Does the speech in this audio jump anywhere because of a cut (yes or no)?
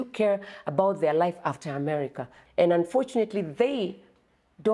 yes